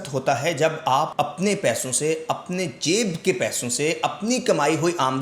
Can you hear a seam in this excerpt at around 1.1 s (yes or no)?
yes